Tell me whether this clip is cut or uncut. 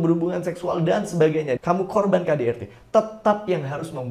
cut